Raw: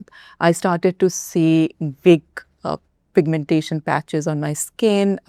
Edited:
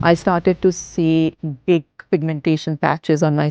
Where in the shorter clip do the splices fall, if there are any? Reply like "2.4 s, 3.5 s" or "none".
2.0 s

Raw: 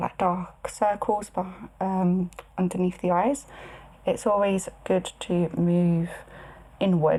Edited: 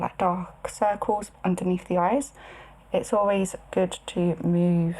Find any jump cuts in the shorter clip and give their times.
1.3 s

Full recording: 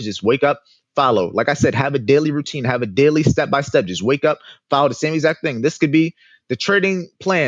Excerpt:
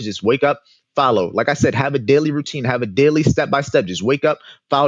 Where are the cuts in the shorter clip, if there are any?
none

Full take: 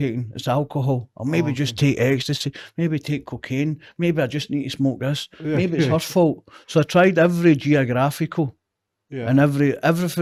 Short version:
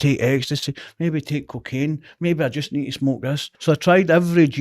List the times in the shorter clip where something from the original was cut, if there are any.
3.5 s

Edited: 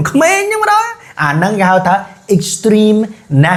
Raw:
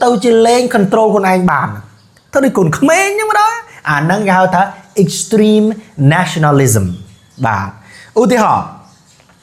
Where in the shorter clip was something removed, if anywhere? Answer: none

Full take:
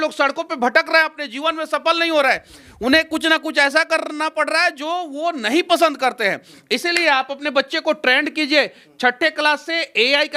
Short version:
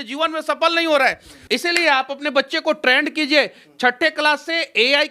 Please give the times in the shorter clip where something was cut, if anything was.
1.3 s

